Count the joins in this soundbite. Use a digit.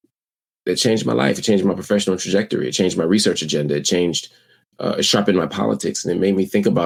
0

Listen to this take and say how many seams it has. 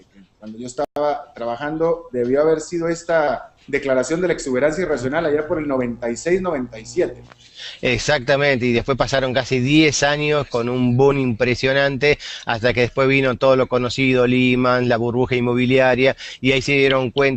0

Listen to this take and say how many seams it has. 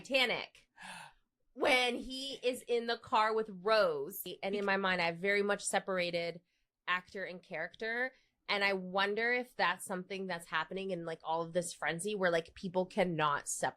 1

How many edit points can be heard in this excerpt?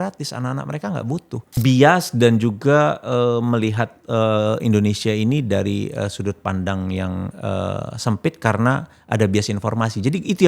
1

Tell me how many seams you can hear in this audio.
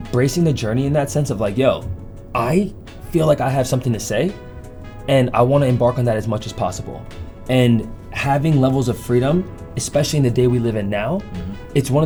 0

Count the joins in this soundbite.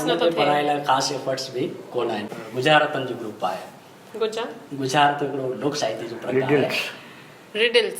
1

